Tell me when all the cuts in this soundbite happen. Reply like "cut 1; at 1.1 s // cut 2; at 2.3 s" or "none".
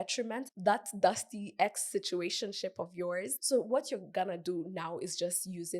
cut 1; at 3.4 s